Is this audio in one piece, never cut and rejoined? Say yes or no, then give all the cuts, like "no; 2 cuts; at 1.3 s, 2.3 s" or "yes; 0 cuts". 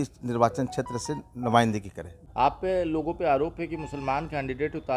no; 1 cut; at 2.2 s